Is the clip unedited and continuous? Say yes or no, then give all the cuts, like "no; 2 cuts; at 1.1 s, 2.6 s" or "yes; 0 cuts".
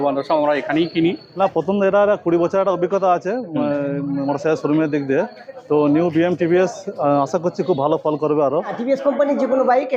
no; 2 cuts; at 1.2 s, 8.8 s